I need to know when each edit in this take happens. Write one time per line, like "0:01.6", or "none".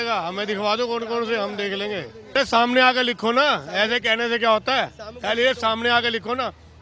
0:02.3